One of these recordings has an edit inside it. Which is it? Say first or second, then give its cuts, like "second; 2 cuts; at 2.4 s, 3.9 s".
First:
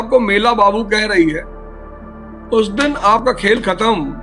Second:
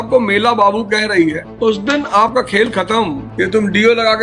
second; 2 cuts; at 1.5 s, 3.2 s